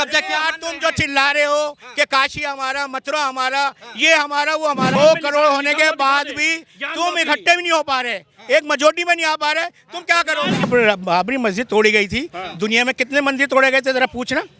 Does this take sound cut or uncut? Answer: cut